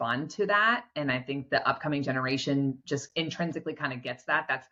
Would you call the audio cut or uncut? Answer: uncut